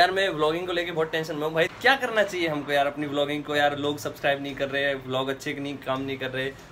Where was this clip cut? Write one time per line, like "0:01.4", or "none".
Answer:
0:01.7